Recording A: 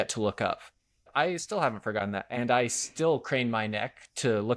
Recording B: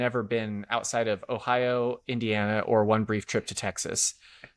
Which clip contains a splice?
A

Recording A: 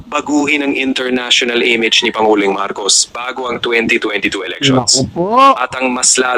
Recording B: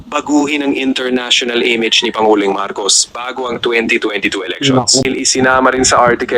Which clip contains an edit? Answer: B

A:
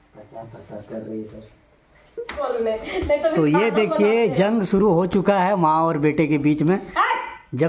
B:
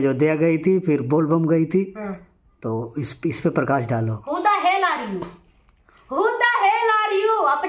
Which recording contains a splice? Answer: A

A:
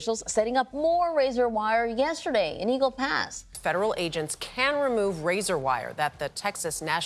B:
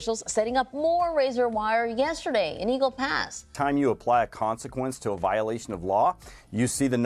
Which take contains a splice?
B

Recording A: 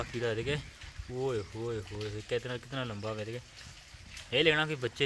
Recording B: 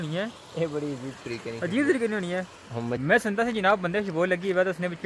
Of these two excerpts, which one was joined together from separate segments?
B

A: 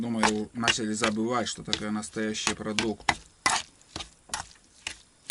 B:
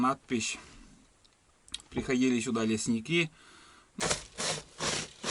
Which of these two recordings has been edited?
B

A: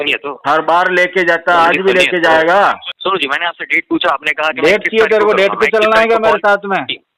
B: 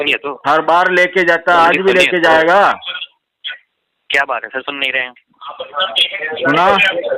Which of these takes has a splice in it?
A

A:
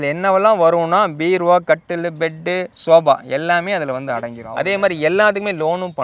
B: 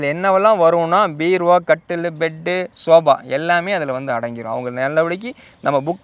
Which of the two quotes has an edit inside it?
A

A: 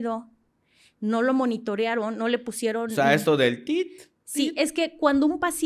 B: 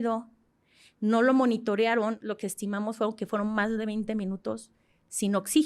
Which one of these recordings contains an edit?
B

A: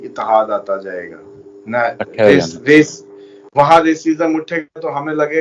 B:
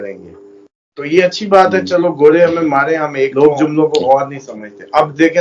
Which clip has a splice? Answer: B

